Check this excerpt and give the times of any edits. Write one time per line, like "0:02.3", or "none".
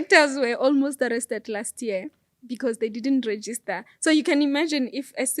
none